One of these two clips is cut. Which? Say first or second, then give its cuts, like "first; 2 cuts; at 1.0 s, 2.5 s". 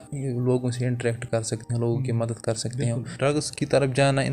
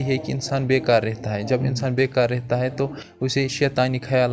first; 1 cut; at 3.1 s